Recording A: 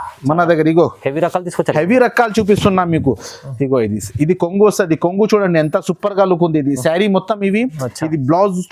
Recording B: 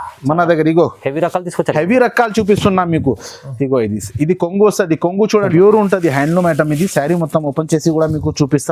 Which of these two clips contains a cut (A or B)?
B